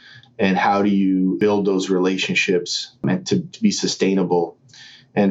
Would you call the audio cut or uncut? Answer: cut